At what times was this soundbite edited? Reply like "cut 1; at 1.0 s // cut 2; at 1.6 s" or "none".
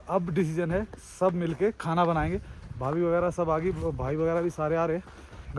none